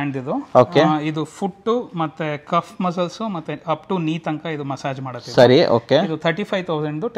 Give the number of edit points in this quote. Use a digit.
0